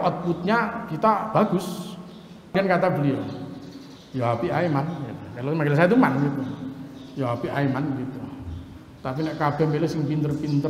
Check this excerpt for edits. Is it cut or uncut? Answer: cut